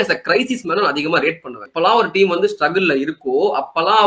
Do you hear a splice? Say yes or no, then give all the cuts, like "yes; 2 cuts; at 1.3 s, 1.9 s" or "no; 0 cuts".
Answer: yes; 1 cut; at 1.7 s